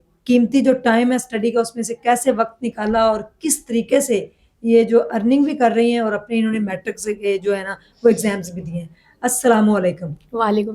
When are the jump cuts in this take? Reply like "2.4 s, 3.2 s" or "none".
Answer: none